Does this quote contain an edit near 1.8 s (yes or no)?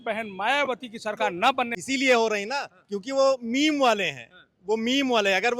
yes